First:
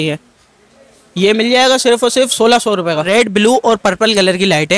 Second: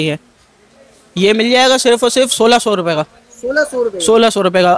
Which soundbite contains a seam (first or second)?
first